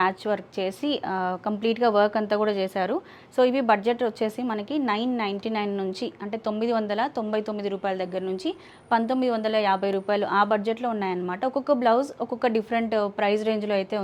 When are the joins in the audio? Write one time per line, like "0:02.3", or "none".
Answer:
none